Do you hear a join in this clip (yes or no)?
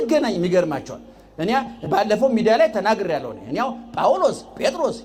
no